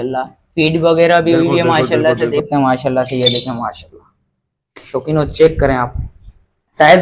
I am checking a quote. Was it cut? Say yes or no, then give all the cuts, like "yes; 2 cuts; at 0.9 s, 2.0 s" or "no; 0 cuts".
yes; 1 cut; at 2.4 s